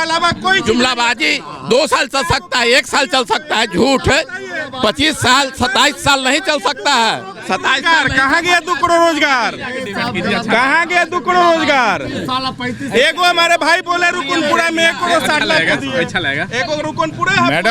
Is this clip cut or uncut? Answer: uncut